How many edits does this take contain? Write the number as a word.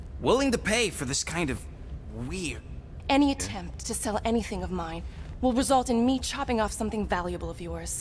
one